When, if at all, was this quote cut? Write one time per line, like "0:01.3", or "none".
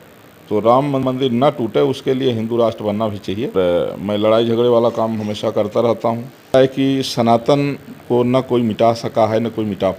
0:01.0
0:03.5
0:06.5